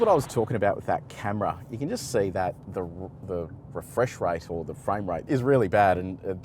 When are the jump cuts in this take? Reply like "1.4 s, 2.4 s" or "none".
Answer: 5.2 s